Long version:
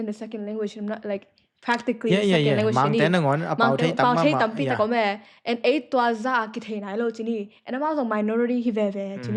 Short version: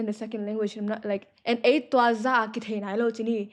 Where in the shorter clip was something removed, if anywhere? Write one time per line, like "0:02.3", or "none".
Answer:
0:01.3